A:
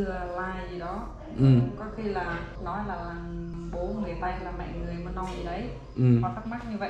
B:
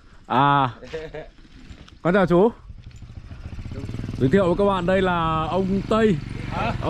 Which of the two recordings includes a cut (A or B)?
A